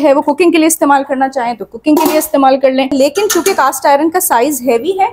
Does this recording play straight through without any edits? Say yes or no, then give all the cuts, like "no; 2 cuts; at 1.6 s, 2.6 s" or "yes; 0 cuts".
no; 1 cut; at 2.9 s